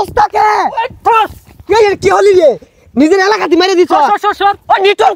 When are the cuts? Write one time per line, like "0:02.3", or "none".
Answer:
none